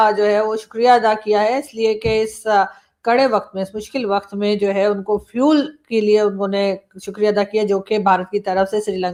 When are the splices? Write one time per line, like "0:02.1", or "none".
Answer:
none